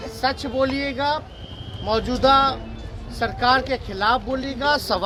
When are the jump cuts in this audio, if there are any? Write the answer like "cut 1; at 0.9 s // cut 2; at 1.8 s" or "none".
none